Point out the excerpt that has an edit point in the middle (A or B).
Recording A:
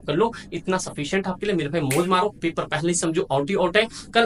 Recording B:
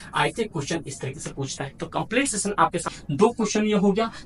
B